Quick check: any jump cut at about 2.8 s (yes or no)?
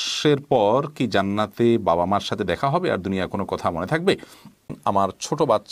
no